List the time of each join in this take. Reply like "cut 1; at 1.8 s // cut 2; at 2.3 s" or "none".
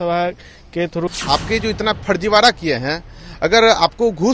cut 1; at 1.1 s